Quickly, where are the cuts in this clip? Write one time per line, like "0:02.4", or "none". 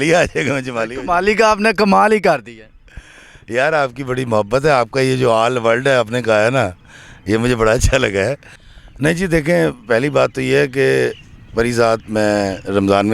0:08.7